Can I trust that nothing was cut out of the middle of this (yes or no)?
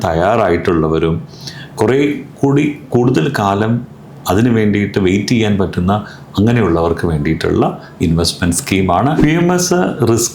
no